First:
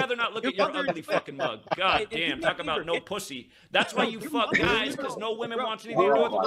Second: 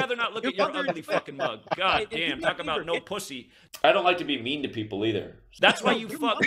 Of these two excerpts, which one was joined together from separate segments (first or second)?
first